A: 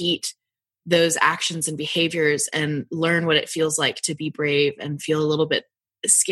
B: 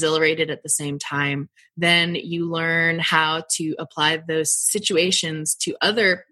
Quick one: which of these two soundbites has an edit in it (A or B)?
B